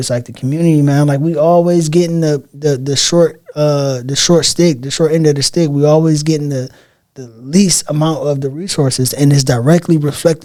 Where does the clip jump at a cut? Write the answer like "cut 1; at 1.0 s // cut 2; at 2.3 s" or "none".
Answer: none